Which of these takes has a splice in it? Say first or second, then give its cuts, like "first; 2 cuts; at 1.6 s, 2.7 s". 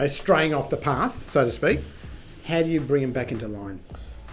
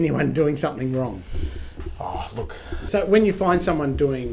second; 1 cut; at 2.8 s